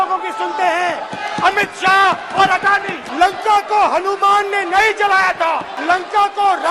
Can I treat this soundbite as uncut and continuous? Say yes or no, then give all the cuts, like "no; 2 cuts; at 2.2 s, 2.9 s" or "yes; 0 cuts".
no; 2 cuts; at 3.0 s, 5.7 s